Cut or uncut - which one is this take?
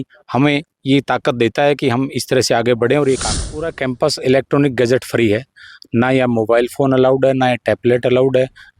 cut